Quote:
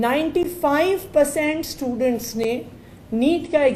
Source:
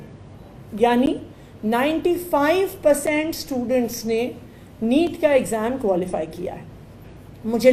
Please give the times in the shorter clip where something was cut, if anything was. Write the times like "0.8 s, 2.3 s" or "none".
none

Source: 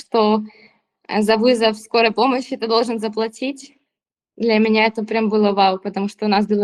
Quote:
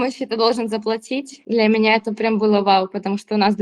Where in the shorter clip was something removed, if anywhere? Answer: 1.3 s

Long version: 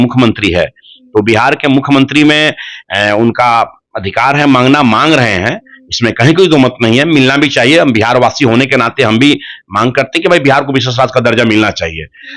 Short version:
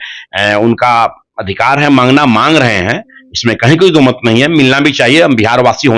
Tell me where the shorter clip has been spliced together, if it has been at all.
none

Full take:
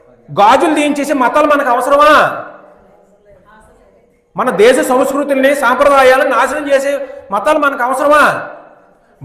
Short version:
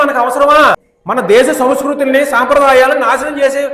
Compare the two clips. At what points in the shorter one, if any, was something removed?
0.9 s

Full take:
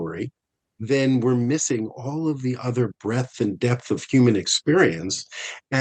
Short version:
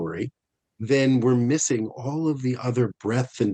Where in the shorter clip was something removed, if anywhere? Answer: none

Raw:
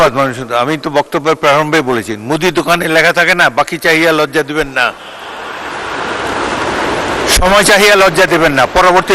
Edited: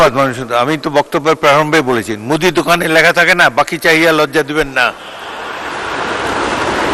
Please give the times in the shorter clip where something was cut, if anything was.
none

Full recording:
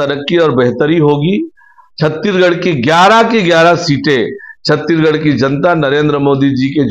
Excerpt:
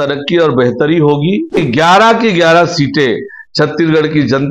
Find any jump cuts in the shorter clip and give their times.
1.5 s

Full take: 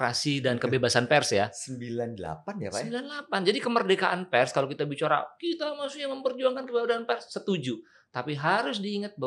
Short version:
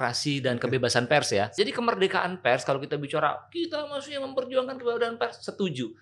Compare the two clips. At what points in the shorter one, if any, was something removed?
1.5 s

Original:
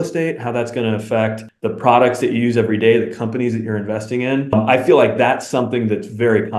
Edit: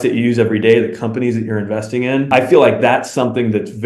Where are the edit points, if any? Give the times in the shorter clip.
2.3 s

